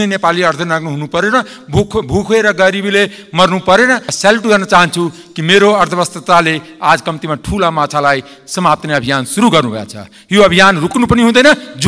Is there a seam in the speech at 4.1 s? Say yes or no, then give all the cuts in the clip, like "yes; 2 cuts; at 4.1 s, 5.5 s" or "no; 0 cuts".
yes; 1 cut; at 4.1 s